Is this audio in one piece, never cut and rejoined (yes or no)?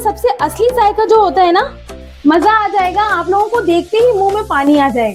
no